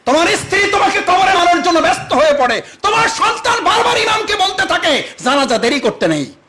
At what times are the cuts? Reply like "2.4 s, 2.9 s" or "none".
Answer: 1.4 s